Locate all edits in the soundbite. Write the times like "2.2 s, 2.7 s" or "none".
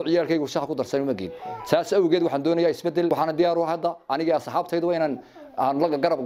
3.1 s